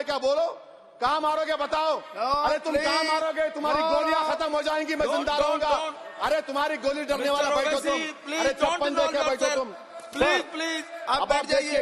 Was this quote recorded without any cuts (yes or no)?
yes